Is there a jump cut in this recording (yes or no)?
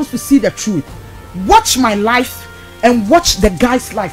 no